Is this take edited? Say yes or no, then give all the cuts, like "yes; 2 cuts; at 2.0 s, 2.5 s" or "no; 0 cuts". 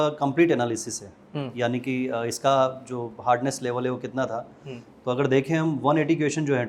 no; 0 cuts